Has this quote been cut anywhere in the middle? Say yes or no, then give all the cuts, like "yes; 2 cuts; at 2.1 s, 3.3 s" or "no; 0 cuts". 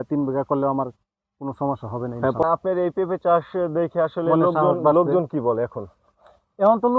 yes; 1 cut; at 2.4 s